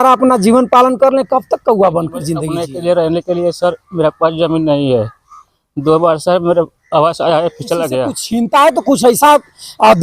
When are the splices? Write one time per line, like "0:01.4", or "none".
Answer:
0:02.5
0:08.2